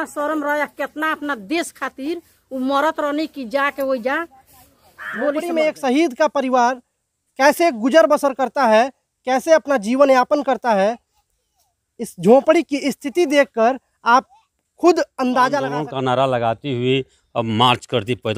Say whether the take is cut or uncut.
cut